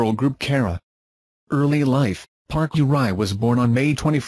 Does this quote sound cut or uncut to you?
cut